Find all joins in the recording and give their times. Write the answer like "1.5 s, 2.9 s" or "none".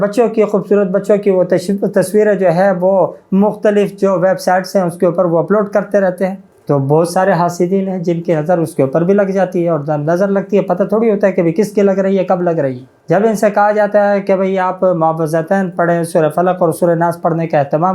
6.5 s, 12.9 s